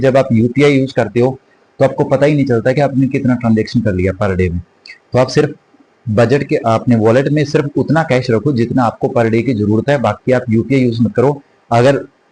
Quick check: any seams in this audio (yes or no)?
no